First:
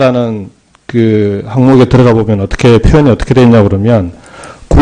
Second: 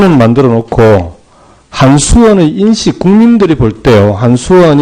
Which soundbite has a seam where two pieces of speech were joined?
second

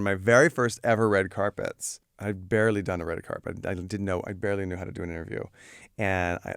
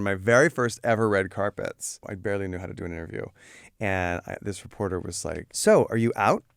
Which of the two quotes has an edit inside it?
second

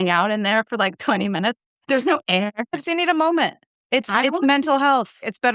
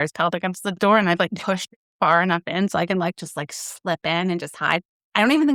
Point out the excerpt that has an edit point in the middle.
first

